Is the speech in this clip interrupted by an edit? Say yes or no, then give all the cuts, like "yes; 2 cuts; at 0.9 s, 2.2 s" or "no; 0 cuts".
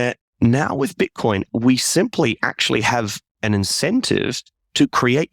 yes; 2 cuts; at 1.5 s, 3.2 s